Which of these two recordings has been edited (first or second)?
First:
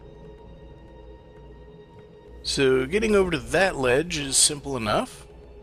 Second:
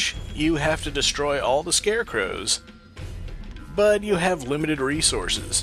second